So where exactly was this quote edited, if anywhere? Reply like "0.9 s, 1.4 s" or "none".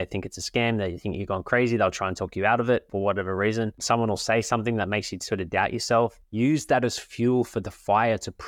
2.9 s, 3.8 s, 6.2 s